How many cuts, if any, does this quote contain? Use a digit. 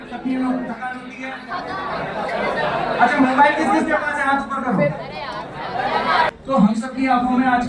0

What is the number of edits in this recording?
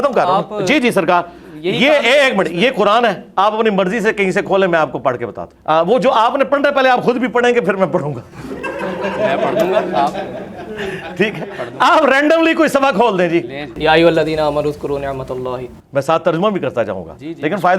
3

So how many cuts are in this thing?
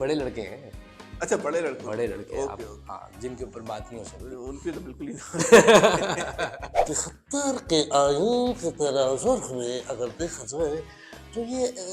1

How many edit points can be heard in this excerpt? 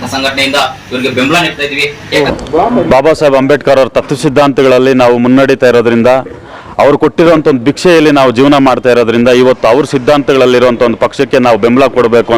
1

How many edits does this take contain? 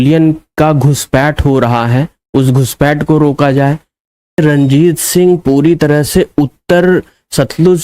1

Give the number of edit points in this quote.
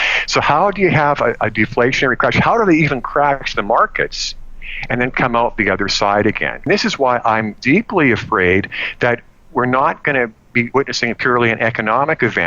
1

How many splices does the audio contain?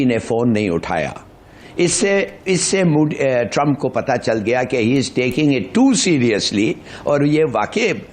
0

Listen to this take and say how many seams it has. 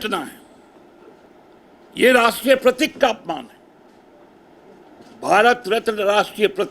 2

